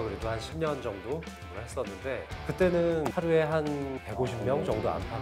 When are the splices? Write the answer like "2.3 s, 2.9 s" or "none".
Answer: none